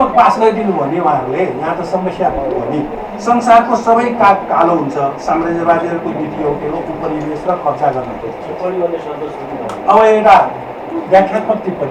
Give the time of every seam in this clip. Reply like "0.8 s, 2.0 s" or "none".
none